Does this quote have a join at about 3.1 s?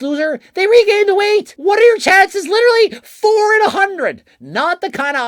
no; 1 cut; at 1.5 s

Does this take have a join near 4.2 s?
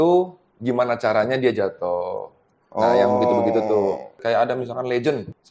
yes; 1 cut; at 4.2 s

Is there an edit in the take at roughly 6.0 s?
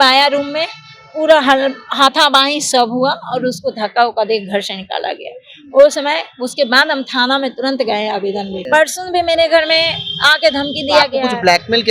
no; 1 cut; at 8.6 s

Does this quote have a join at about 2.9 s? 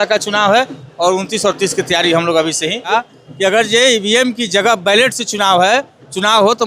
yes; 1 cut; at 2.9 s

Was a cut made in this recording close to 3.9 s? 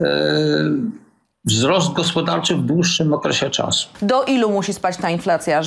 yes; 1 cut; at 3.9 s

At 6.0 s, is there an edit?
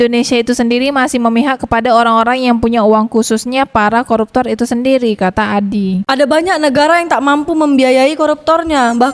yes; 1 cut; at 6.0 s

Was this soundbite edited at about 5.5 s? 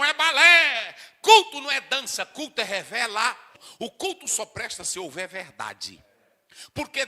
no; 1 cut; at 3.5 s

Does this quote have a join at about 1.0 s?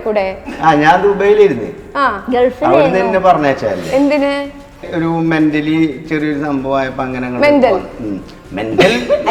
no; 1 cut; at 4.8 s

